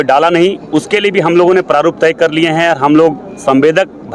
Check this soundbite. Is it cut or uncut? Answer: uncut